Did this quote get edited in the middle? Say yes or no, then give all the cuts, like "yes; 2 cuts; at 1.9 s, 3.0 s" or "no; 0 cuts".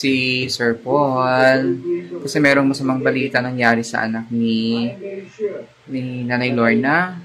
no; 0 cuts